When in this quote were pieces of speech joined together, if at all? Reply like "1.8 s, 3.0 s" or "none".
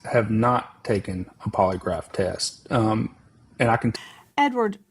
3.9 s